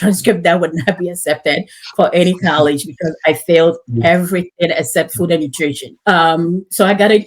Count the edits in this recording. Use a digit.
1